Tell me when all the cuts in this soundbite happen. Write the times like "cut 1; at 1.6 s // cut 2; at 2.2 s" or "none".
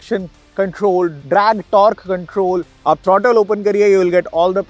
cut 1; at 2.7 s

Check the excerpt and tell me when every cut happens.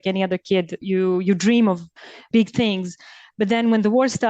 cut 1; at 0.8 s // cut 2; at 2.2 s

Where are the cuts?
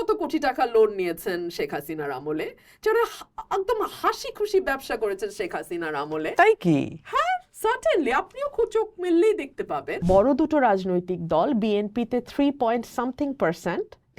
cut 1; at 10.0 s

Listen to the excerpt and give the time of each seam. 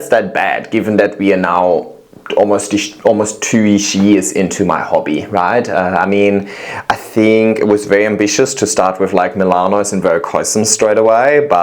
none

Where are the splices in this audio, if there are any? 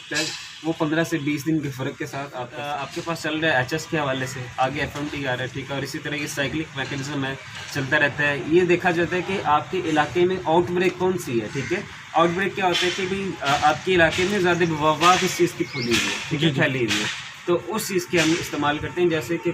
cut 1; at 2.6 s

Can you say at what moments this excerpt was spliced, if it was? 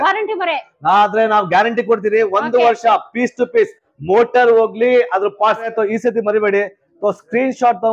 cut 1; at 5.7 s

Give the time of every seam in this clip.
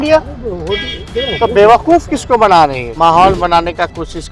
cut 1; at 2.8 s

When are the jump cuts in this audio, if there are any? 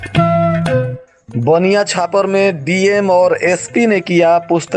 cut 1; at 1.0 s

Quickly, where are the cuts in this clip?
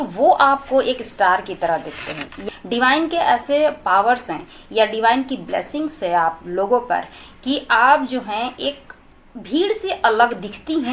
cut 1; at 2.4 s

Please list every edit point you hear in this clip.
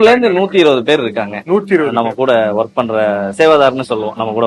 cut 1; at 3.3 s

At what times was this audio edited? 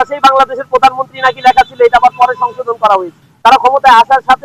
cut 1; at 3.2 s

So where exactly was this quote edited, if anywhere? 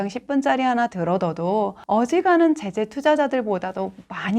cut 1; at 1.8 s

